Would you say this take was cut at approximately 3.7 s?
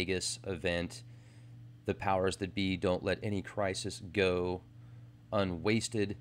yes; 1 cut; at 3.7 s

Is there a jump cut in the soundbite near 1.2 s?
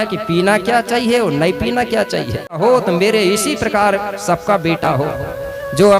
no; 1 cut; at 2.6 s

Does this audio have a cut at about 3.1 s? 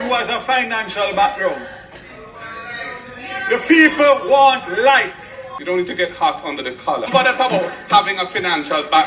no; 2 cuts; at 5.5 s, 7.1 s

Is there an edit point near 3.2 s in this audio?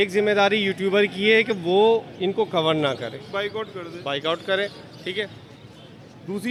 no; 0 cuts

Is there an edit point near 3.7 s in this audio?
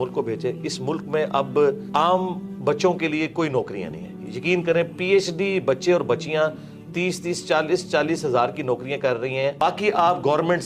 no; 2 cuts; at 1.8 s, 9.6 s

